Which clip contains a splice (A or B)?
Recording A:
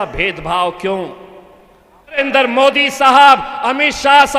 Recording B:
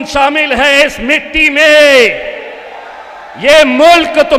A